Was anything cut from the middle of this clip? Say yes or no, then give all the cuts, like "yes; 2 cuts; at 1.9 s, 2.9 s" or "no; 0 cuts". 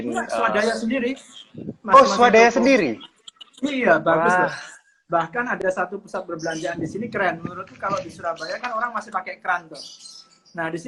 no; 0 cuts